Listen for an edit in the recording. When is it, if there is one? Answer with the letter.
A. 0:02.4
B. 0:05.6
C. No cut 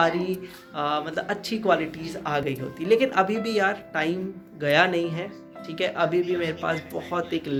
C